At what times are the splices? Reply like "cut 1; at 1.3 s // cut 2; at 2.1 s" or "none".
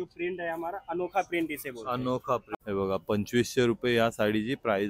cut 1; at 2.5 s